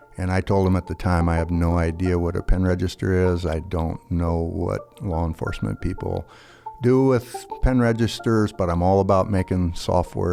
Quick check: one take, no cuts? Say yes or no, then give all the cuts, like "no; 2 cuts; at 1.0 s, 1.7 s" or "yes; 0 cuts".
yes; 0 cuts